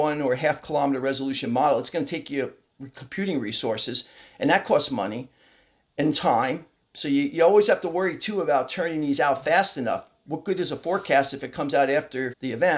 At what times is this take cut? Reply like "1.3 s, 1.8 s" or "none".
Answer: none